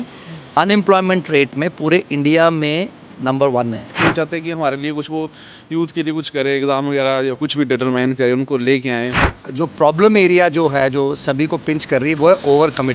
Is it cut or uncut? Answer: cut